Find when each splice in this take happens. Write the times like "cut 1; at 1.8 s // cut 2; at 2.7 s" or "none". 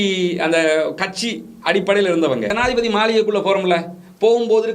cut 1; at 2.5 s